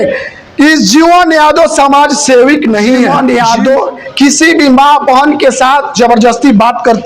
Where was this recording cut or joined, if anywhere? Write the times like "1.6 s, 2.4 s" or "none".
3.1 s